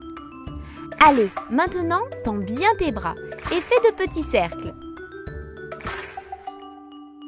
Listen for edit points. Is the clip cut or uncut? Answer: cut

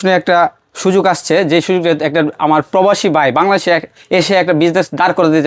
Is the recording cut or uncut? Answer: uncut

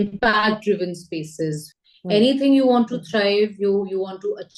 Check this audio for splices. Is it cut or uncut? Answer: cut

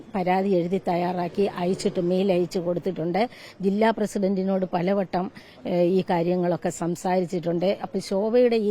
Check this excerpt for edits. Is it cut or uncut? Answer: uncut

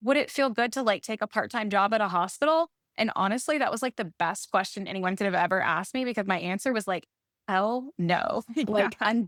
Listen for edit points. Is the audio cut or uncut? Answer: uncut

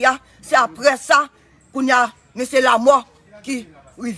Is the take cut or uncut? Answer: uncut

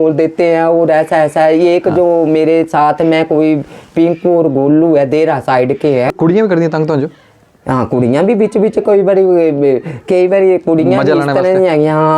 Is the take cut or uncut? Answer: cut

